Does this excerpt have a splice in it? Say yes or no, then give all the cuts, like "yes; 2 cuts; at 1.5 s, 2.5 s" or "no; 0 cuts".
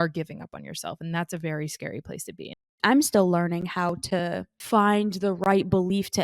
yes; 2 cuts; at 2.7 s, 4.5 s